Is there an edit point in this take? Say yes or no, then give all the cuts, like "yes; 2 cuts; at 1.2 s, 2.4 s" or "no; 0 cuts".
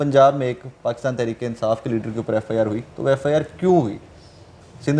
no; 0 cuts